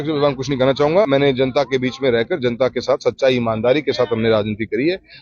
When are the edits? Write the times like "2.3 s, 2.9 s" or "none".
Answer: 1.1 s

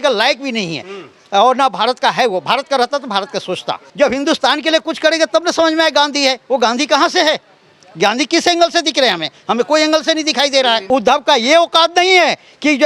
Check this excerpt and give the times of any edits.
3.9 s, 10.9 s

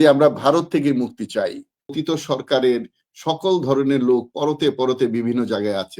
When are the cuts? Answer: 2.0 s

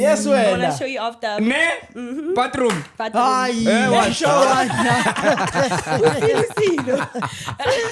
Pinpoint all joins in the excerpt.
none

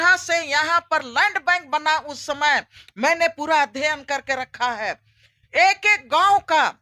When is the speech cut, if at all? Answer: none

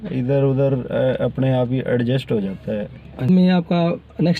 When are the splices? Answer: 3.3 s

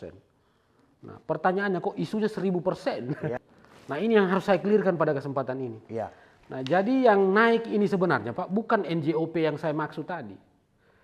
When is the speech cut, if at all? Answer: 3.3 s

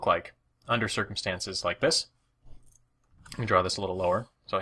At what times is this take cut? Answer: 1.1 s

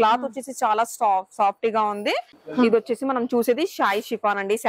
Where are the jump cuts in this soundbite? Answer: 2.4 s

